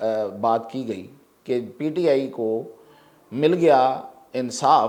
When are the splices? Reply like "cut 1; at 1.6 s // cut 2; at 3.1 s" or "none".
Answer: none